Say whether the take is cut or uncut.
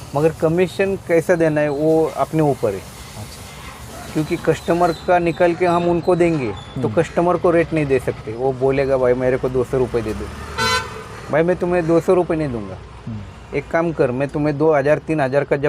cut